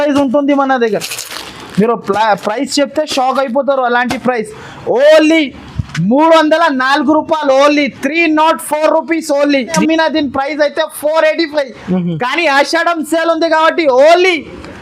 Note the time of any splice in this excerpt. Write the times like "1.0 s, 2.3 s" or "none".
9.8 s

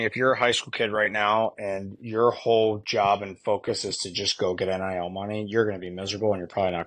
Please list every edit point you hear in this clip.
none

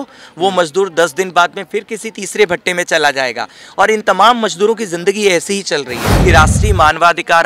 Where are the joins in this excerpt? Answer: 6.0 s

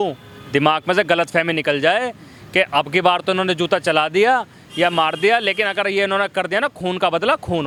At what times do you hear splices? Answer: none

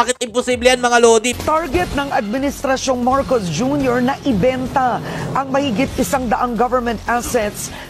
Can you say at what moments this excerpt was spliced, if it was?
1.3 s

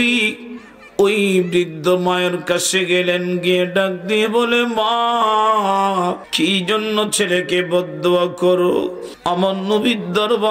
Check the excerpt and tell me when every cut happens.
6.3 s, 9.1 s

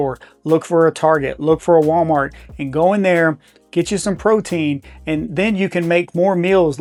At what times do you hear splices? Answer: none

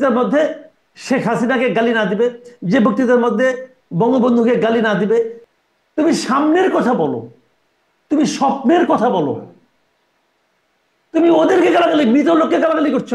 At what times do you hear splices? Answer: 5.4 s

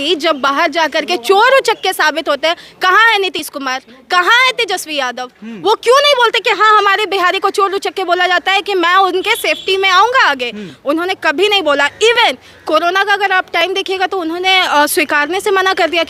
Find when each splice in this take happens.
none

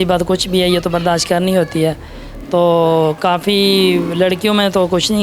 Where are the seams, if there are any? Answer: none

